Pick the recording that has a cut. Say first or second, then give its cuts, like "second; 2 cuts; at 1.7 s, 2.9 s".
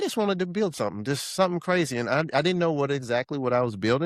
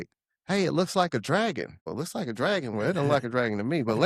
second; 1 cut; at 1.9 s